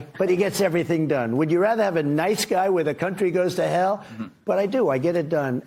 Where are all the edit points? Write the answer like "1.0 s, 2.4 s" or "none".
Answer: none